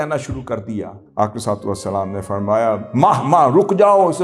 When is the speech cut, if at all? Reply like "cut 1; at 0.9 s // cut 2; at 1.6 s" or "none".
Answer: cut 1; at 1.0 s